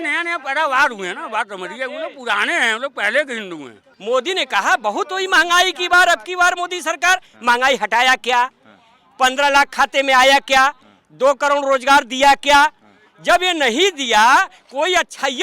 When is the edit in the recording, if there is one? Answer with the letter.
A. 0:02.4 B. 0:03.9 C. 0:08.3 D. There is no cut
B